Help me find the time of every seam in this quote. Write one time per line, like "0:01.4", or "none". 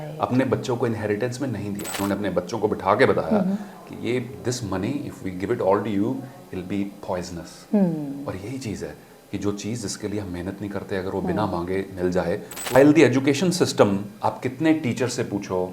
0:02.0
0:12.8